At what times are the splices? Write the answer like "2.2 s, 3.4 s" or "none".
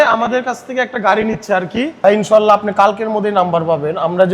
2.0 s

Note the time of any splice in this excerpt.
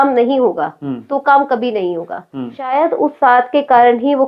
2.7 s

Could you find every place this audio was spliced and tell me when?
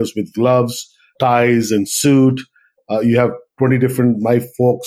1.1 s, 2.8 s

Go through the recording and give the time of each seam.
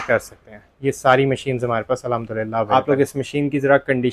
2.7 s

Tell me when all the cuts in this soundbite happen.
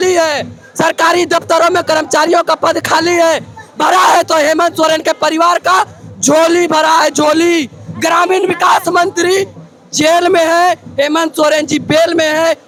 none

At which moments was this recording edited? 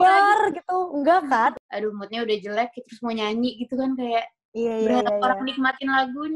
1.5 s

